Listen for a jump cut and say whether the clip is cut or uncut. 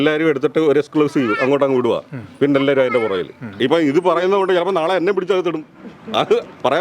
cut